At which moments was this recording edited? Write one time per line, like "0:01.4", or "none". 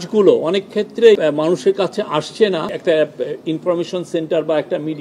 0:01.2
0:02.8